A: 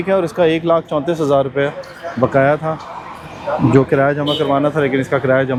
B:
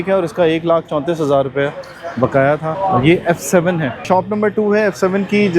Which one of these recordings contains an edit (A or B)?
B